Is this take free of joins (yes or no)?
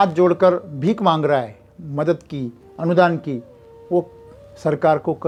yes